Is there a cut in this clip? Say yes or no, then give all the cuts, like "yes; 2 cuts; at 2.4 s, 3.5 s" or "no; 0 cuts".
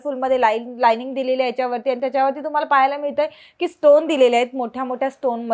no; 0 cuts